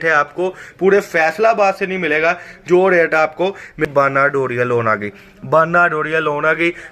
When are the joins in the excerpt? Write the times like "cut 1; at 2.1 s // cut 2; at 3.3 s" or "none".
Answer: cut 1; at 3.9 s